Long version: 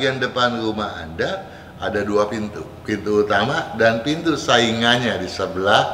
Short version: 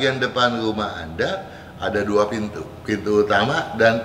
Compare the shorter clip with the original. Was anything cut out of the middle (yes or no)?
no